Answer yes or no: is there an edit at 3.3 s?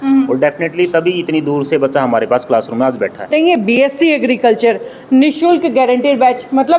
yes